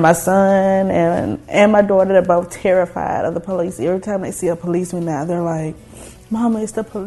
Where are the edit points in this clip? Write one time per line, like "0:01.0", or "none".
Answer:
none